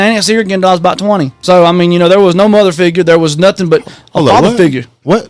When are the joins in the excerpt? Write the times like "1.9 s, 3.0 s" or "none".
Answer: 1.4 s